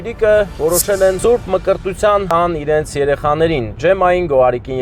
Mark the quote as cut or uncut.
cut